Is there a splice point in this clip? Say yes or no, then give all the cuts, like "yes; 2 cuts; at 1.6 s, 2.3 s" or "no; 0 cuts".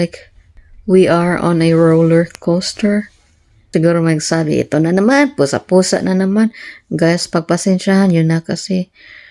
yes; 1 cut; at 3.7 s